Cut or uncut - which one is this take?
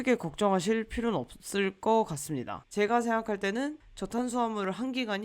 cut